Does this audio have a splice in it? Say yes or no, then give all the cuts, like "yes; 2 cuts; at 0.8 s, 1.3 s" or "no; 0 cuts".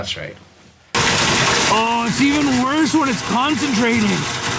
yes; 1 cut; at 0.9 s